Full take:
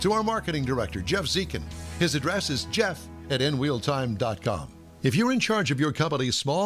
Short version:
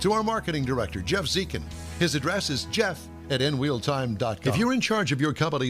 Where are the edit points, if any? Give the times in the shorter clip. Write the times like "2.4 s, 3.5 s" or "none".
4.4 s

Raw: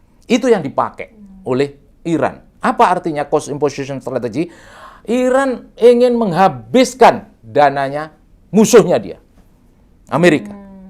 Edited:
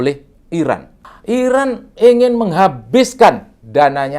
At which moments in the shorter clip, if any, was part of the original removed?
0.9 s

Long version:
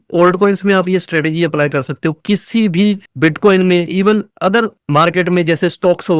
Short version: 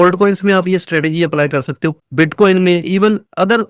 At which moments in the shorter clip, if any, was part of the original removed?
2.0 s

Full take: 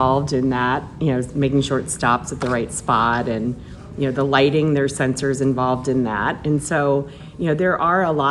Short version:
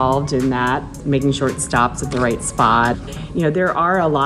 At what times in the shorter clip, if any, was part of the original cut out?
1.0 s, 3.0 s

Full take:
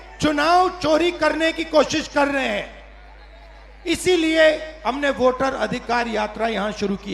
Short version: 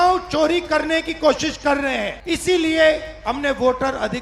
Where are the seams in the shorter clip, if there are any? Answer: 2.2 s

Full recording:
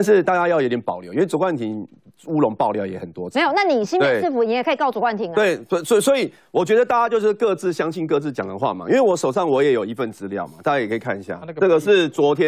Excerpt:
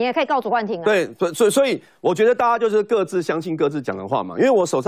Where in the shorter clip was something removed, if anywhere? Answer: none

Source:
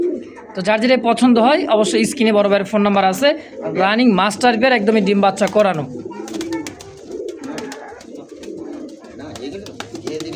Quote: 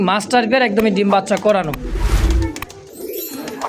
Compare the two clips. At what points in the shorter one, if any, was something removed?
none

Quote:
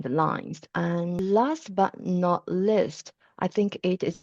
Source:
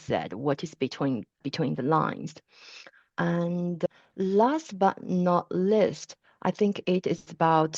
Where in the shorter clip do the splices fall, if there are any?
1.0 s

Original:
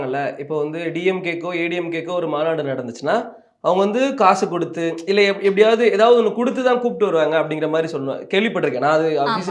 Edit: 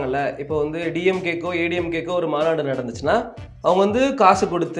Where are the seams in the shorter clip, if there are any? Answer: none

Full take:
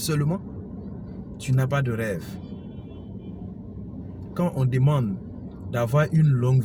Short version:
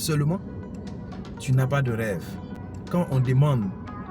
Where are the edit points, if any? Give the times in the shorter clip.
2.6 s

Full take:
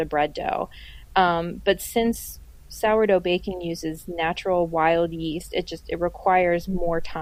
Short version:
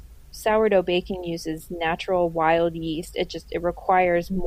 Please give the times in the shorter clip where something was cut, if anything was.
none

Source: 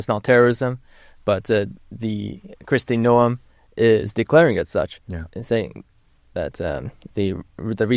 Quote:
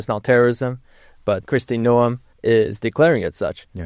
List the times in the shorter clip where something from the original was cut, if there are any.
1.4 s, 2.3 s

